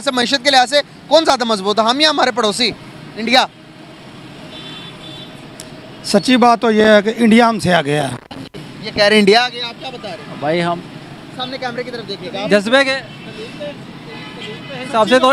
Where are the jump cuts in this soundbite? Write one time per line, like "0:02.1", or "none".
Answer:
none